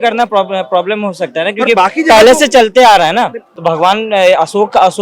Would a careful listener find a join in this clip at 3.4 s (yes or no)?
yes